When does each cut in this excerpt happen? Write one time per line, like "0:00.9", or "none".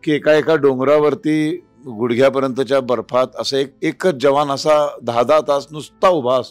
none